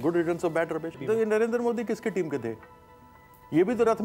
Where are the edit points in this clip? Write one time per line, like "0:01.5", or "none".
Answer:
0:00.9